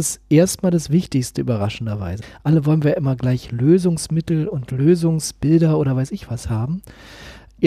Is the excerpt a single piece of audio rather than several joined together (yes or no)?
yes